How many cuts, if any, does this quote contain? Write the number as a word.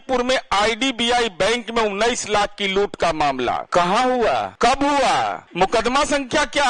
three